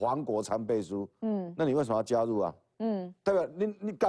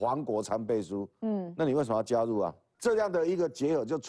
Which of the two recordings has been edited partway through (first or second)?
second